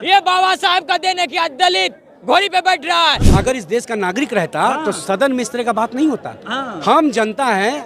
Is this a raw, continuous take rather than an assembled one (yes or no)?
no